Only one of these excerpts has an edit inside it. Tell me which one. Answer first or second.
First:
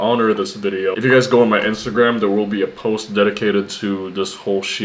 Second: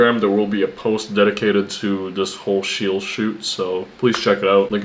first